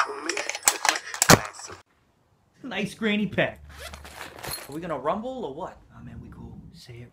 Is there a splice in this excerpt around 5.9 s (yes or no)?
no